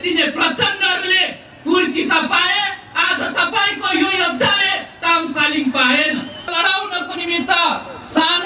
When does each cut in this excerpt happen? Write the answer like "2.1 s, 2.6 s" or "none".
6.5 s